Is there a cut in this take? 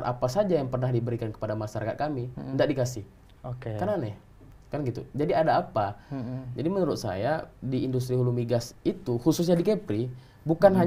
no; 0 cuts

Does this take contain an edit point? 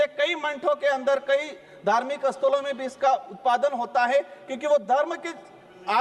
no; 0 cuts

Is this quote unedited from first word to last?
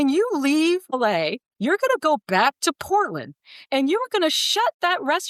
no; 1 cut; at 0.9 s

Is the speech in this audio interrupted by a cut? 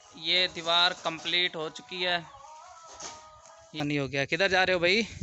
yes; 1 cut; at 3.8 s

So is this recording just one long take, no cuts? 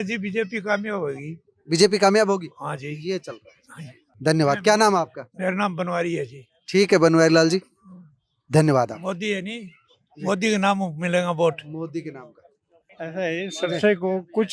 yes; 0 cuts

